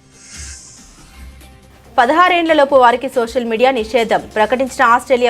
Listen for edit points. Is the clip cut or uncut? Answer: uncut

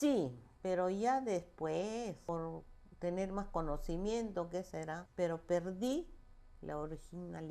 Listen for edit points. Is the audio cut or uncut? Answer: cut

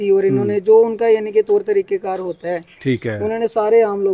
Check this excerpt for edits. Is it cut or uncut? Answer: uncut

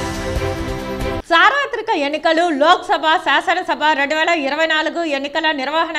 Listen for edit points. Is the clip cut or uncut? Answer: cut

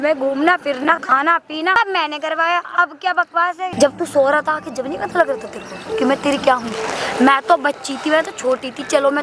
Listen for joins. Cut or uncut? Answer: cut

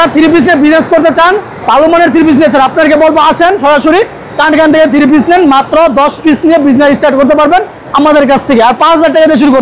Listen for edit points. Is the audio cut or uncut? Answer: uncut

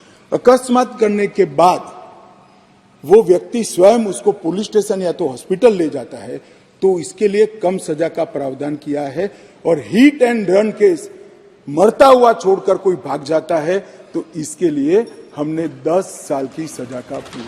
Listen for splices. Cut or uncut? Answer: uncut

